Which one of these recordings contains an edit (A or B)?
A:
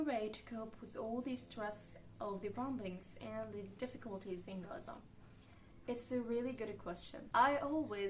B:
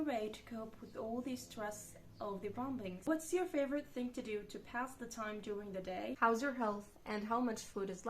B